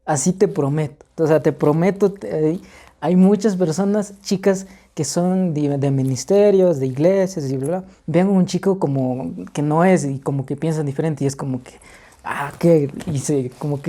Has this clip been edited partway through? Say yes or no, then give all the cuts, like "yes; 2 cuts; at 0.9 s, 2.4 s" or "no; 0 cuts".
no; 0 cuts